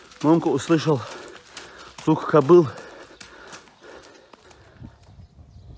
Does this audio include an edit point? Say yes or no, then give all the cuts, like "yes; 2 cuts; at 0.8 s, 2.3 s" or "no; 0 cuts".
yes; 1 cut; at 4.6 s